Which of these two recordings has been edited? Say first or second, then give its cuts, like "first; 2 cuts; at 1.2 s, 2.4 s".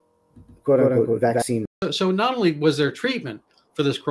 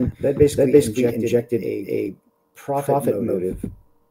first; 1 cut; at 1.8 s